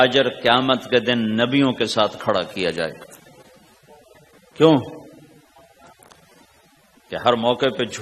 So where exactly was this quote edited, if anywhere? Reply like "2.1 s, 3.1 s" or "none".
3.4 s